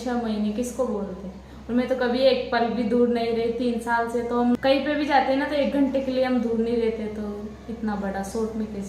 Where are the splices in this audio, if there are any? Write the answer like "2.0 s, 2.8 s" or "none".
4.6 s